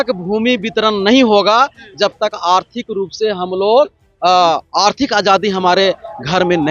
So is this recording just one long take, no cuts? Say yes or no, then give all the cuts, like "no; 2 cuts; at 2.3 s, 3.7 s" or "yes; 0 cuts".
yes; 0 cuts